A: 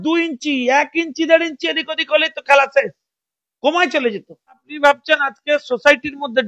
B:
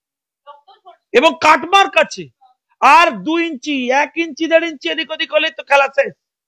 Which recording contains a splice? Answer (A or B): A